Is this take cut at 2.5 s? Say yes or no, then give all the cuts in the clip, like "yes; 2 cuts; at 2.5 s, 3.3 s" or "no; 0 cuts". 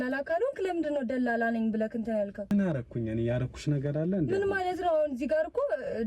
yes; 1 cut; at 2.5 s